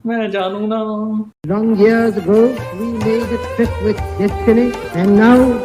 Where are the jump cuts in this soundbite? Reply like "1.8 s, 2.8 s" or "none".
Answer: 1.3 s